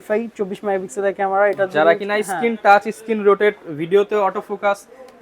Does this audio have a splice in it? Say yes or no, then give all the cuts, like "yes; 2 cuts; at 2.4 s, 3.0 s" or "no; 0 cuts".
no; 0 cuts